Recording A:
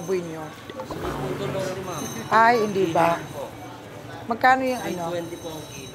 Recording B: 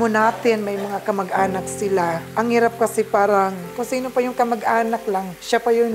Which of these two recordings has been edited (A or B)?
B